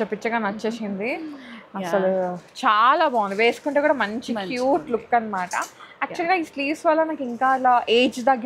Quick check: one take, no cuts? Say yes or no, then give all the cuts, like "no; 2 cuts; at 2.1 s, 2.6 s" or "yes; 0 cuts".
yes; 0 cuts